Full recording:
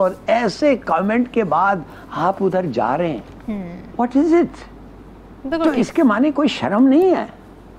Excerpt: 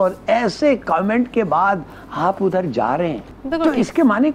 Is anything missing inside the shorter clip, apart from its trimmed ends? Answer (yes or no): yes